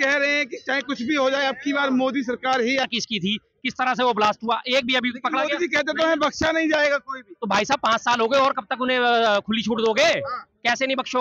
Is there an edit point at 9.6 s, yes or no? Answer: no